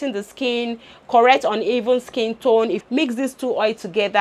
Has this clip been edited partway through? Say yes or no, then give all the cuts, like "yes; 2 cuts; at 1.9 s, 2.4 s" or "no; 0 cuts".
yes; 1 cut; at 2.8 s